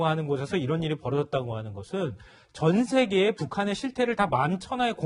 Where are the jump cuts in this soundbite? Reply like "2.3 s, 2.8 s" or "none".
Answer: none